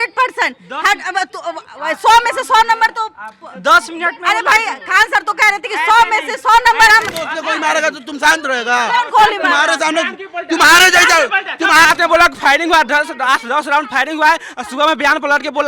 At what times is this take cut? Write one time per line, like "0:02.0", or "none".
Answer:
0:07.2
0:11.9